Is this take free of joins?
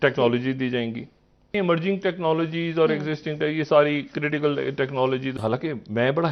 no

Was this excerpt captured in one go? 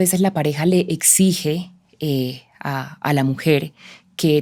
yes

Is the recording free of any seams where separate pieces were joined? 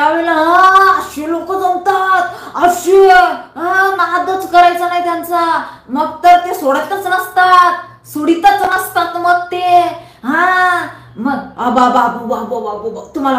yes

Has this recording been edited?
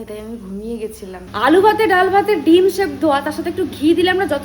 yes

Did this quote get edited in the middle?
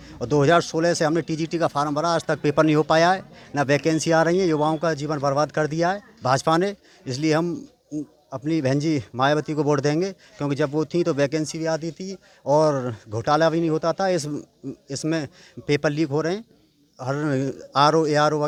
no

